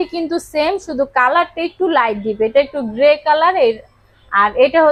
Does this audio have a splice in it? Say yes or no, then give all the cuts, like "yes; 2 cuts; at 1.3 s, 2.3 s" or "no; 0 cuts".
no; 0 cuts